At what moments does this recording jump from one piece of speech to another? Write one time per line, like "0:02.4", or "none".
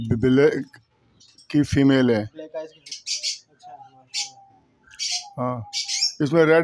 0:02.8

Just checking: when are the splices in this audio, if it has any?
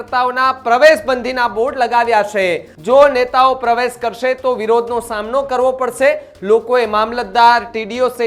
0:02.7

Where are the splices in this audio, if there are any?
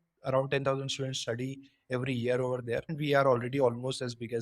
0:02.9

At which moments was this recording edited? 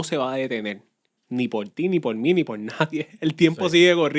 none

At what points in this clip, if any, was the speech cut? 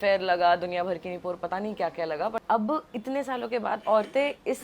0:02.4

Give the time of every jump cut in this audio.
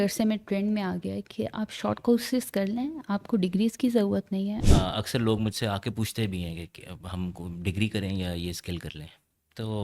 0:04.6

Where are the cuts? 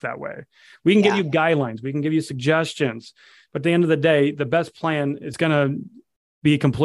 0:05.3

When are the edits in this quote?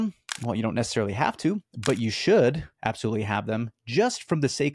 none

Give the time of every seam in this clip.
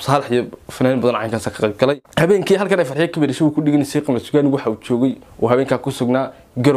0:02.0

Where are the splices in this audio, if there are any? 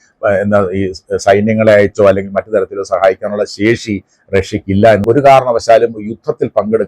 0:05.0

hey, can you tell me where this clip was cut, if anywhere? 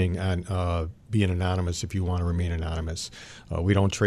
none

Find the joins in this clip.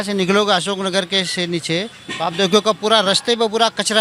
none

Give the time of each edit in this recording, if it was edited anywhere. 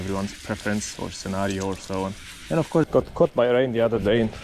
0:02.9

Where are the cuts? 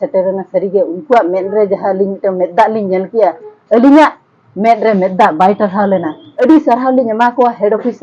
0:06.3

